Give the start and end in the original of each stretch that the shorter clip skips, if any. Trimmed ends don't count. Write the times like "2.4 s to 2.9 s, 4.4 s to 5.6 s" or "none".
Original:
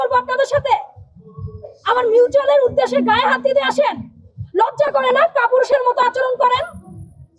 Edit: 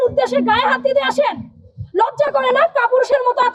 none

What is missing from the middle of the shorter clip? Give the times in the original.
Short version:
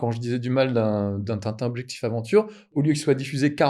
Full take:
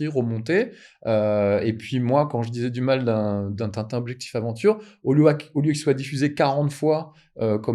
5.0 s to 5.4 s

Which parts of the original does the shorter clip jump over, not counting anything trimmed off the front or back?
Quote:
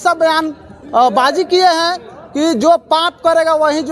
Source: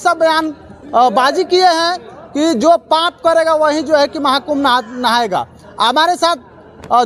none

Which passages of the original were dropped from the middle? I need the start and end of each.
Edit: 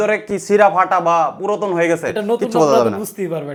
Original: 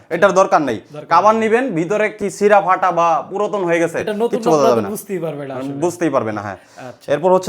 none

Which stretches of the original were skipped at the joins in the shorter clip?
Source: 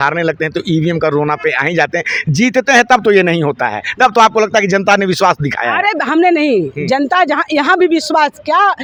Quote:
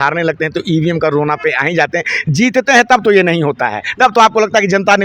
none

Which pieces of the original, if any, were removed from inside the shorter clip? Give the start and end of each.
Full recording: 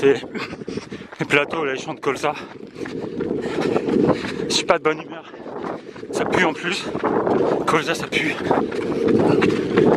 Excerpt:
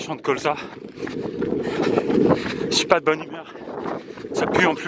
none

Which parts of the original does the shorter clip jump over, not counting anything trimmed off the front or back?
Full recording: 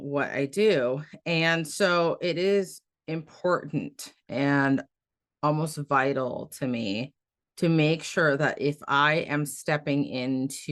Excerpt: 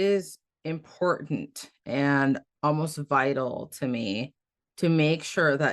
4.9 s to 5.3 s

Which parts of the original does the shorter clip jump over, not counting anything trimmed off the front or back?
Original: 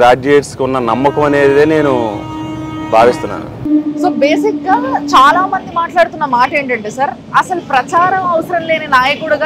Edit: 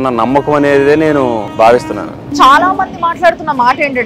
2.2 s to 2.8 s, 3.6 s to 5.0 s

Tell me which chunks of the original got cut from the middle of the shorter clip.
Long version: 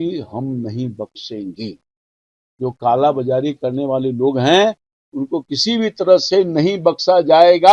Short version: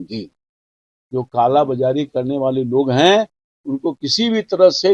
none

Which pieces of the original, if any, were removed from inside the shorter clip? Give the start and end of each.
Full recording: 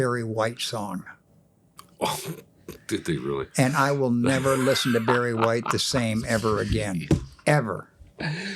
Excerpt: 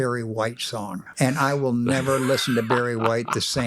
1.1 s to 3.5 s

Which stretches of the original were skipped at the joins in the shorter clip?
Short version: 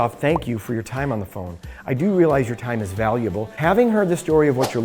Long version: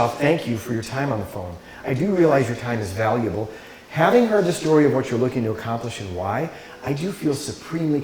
3.5 s to 3.8 s

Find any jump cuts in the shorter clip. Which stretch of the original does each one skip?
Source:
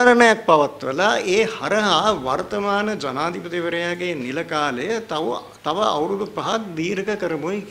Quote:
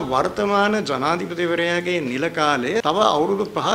5.0 s to 5.6 s

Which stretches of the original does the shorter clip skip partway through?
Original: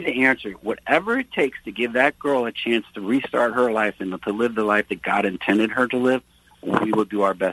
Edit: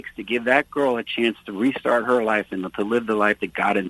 none

